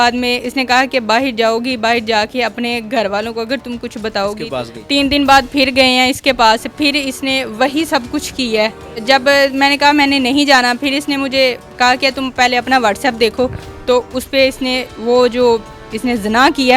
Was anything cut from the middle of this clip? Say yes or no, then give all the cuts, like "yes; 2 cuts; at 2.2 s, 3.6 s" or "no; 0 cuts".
yes; 3 cuts; at 4.5 s, 8.9 s, 13.6 s